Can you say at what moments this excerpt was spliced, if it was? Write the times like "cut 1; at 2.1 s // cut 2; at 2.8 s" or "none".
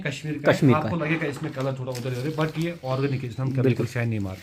none